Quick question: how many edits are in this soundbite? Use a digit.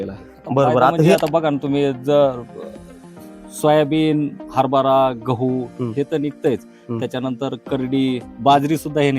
1